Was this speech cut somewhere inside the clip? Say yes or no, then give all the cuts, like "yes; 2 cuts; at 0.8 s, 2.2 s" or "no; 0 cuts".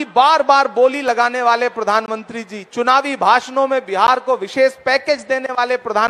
no; 0 cuts